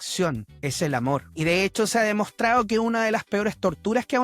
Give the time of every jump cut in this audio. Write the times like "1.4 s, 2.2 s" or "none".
1.3 s